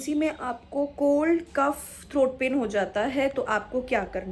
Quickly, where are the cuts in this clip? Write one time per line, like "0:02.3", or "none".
none

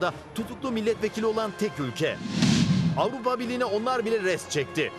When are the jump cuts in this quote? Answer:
0:02.5

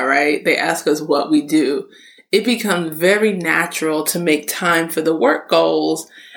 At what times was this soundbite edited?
none

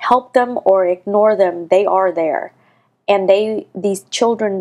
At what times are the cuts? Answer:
none

